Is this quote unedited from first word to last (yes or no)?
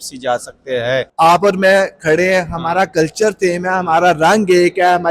no